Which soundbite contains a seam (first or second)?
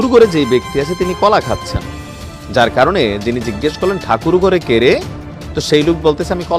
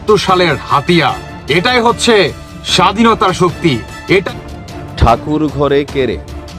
second